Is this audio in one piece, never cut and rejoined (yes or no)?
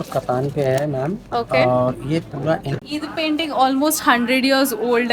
no